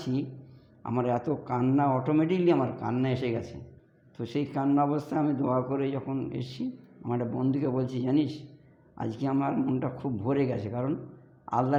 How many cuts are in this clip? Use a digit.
0